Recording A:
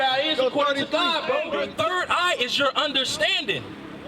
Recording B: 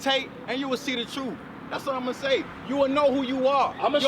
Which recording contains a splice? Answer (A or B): A